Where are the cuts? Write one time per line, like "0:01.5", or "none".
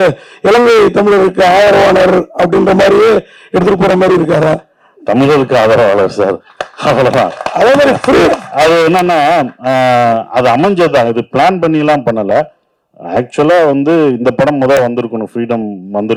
none